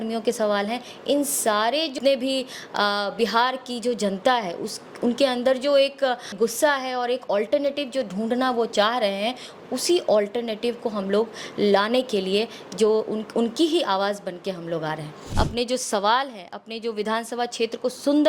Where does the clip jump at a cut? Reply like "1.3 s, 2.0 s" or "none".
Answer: 1.9 s, 6.3 s, 15.3 s